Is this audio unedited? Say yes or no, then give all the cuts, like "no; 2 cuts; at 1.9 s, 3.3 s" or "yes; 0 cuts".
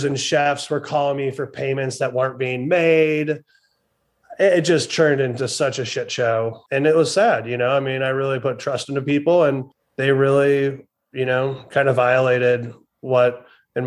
yes; 0 cuts